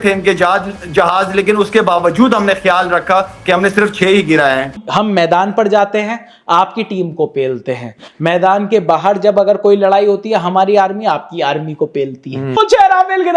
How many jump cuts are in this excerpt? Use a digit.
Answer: 1